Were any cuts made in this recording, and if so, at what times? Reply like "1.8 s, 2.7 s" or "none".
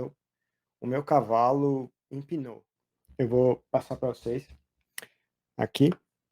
2.4 s